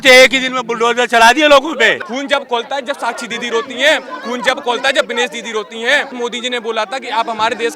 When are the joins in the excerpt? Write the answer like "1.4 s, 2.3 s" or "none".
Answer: 2.0 s, 6.1 s